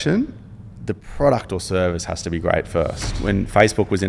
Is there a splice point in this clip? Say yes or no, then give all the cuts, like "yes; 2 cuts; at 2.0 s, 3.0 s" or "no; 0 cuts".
yes; 1 cut; at 3.1 s